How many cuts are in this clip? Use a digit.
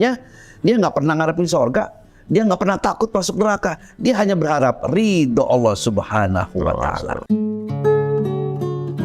0